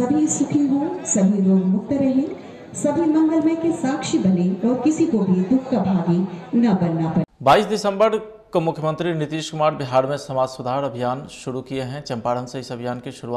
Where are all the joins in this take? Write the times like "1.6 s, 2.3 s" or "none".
7.4 s

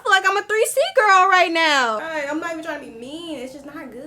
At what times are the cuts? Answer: 2.0 s

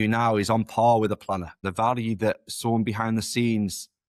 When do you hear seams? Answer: 1.6 s

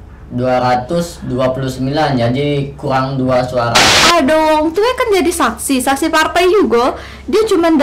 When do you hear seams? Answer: 4.0 s

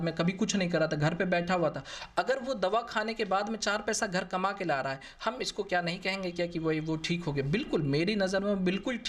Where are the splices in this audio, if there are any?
none

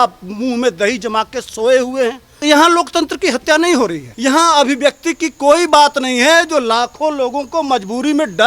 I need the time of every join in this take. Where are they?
2.4 s, 4.1 s

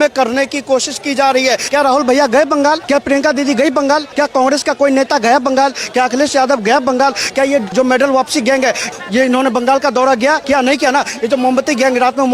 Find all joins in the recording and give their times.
1.6 s, 2.8 s, 4.1 s, 7.7 s, 8.9 s, 10.4 s

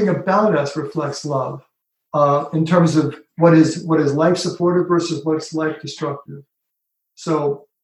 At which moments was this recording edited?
none

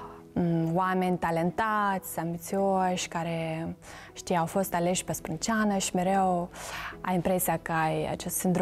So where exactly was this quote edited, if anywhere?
none

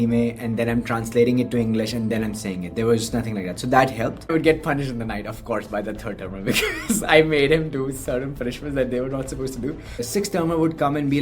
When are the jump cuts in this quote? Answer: 4.3 s, 10.0 s

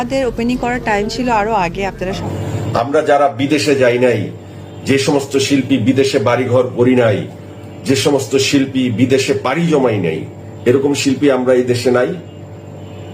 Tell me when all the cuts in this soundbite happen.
2.2 s

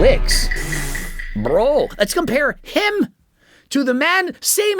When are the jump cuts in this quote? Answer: 1.9 s

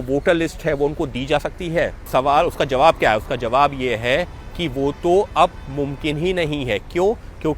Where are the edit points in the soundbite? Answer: none

